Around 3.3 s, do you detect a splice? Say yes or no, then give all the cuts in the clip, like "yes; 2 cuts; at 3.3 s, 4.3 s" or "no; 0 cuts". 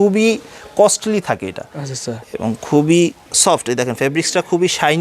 yes; 1 cut; at 3.3 s